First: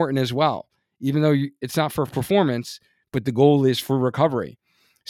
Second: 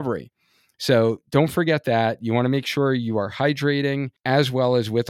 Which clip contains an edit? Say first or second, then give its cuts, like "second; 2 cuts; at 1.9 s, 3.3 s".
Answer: second; 1 cut; at 4.1 s